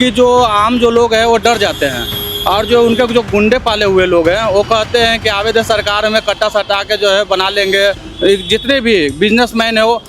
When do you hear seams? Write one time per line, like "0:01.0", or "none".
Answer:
0:08.1